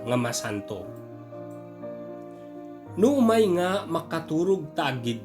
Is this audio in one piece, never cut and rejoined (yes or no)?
no